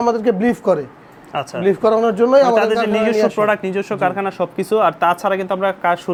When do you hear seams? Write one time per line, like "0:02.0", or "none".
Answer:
none